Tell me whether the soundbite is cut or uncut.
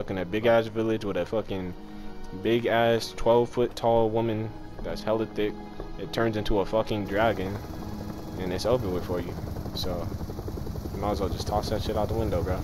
uncut